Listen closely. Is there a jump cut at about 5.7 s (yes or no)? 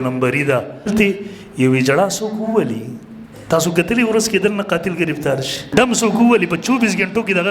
yes